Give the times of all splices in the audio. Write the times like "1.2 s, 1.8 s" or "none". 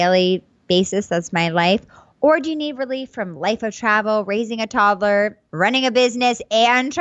5.4 s